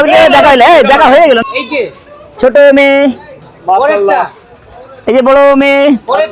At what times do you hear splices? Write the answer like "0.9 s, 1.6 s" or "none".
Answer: 1.4 s